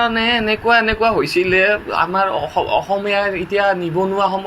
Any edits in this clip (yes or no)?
no